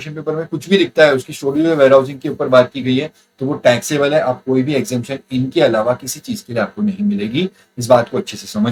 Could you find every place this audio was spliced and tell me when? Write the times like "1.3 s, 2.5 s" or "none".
none